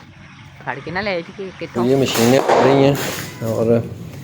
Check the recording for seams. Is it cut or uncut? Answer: cut